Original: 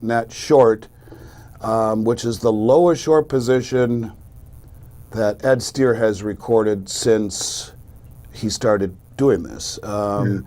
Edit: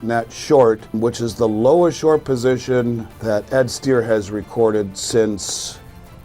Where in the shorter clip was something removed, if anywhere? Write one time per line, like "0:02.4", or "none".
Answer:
0:00.9
0:03.1